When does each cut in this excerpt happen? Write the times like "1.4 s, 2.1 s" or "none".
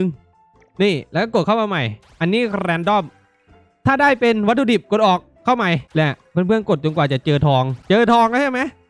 5.9 s, 7.8 s